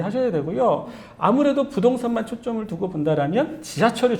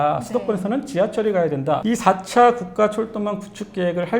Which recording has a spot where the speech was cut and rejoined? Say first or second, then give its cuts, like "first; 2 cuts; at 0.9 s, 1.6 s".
second; 1 cut; at 1.8 s